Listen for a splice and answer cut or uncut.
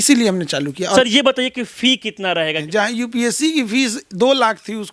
cut